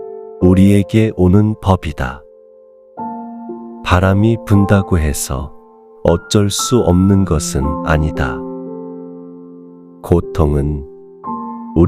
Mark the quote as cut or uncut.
cut